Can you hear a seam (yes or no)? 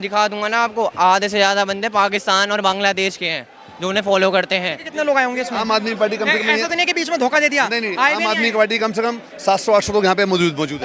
yes